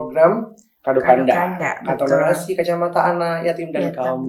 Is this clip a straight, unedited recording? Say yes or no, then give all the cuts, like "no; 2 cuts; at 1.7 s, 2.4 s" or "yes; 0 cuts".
yes; 0 cuts